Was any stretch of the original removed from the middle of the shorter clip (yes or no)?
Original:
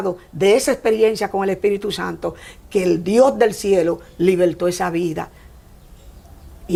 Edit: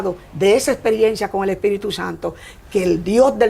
no